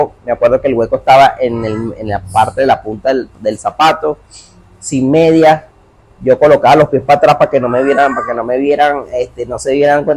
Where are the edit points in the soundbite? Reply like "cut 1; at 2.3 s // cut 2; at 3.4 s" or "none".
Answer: none